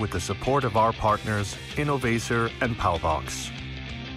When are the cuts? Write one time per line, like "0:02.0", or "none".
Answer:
0:03.3